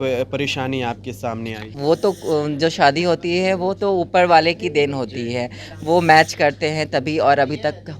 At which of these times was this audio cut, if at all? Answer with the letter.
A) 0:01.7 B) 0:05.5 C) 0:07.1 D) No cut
A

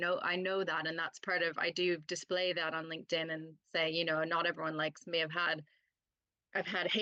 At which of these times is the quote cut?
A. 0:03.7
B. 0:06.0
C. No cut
C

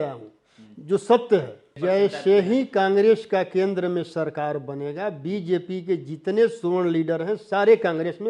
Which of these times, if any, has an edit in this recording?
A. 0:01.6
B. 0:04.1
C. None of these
A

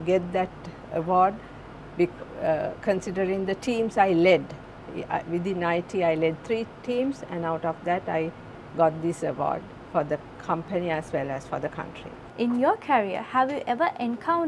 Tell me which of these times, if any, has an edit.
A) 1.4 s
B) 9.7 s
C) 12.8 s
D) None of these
D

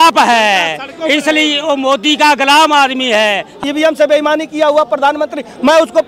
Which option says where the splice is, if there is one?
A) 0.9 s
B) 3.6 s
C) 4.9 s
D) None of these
B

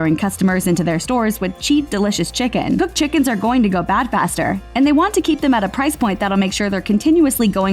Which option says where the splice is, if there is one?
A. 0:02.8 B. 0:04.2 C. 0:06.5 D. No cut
A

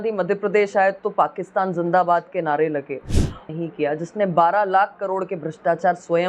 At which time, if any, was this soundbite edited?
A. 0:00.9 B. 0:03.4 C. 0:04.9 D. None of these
B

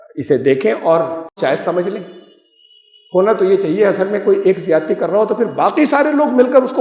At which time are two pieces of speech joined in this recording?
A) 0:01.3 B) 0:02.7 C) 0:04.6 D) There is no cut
A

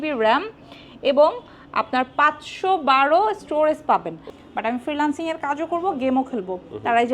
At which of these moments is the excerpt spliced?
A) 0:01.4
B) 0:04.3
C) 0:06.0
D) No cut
B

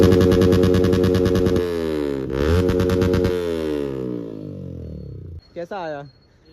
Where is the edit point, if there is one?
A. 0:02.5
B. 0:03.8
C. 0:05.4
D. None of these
C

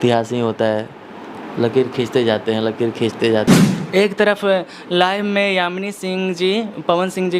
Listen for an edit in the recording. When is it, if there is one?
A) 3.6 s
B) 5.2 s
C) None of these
A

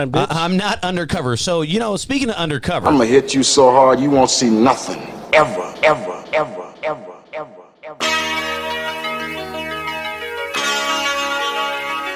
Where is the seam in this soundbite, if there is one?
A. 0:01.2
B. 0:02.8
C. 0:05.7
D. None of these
B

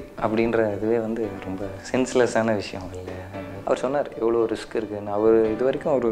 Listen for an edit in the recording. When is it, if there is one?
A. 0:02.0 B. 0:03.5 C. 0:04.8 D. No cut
B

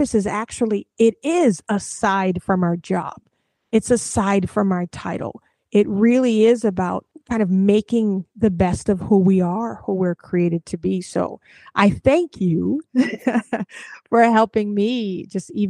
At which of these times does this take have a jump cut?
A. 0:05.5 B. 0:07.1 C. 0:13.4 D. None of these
B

